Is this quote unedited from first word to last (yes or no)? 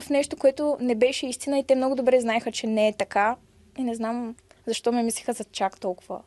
yes